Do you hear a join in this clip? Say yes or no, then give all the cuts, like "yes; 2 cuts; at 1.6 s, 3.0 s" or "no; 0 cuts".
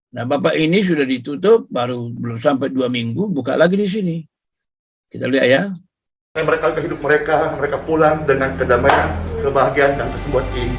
no; 0 cuts